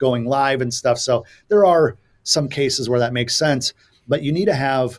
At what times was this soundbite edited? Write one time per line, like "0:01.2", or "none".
none